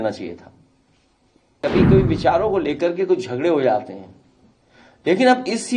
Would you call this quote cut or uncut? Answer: cut